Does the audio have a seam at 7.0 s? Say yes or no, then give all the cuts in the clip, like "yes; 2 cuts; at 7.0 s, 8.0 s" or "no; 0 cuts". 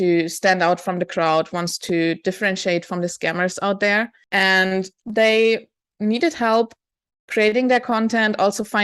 no; 2 cuts; at 4.2 s, 5.0 s